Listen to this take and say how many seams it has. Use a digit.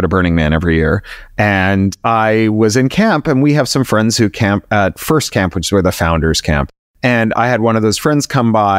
1